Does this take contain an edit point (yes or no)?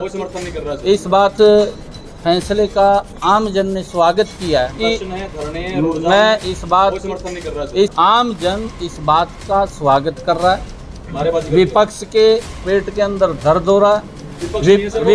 yes